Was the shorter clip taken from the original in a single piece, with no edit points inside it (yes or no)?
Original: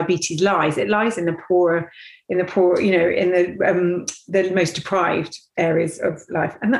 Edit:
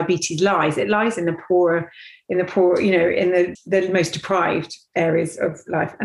no